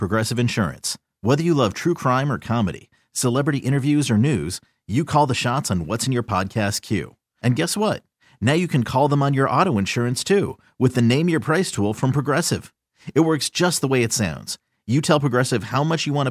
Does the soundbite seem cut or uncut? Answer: uncut